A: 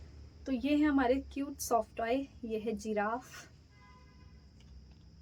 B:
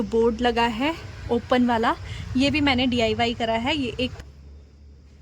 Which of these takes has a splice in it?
B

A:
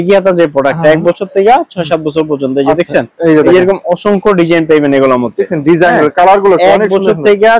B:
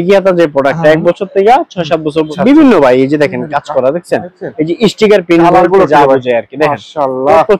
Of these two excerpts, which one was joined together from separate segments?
B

